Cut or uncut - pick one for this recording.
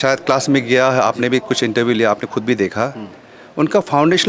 uncut